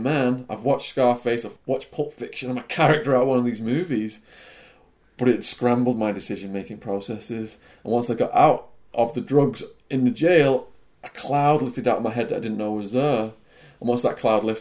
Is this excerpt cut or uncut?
cut